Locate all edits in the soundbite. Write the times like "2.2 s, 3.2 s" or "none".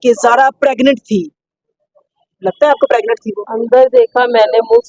3.5 s